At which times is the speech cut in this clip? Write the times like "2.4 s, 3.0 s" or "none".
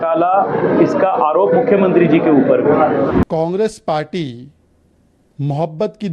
3.1 s